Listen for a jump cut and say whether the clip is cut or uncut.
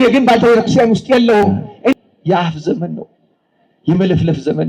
cut